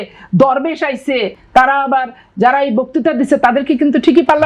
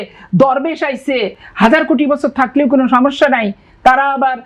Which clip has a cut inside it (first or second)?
first